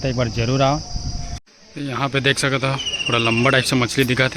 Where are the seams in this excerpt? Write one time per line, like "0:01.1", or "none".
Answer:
0:01.5